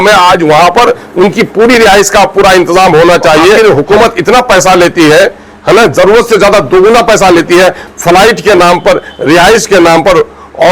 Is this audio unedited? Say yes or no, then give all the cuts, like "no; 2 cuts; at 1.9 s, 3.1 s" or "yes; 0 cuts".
no; 1 cut; at 3.6 s